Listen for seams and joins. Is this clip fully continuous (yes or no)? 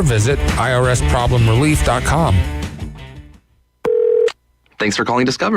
no